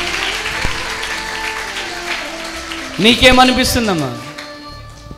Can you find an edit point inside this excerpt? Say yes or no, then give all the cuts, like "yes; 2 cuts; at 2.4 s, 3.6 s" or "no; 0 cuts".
no; 0 cuts